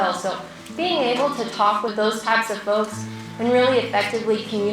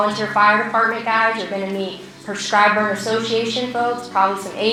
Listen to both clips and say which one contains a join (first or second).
first